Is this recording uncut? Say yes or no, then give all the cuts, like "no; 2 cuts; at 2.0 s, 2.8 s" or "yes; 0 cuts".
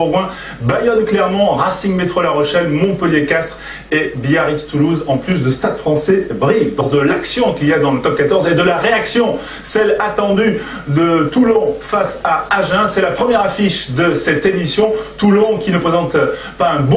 no; 1 cut; at 12.1 s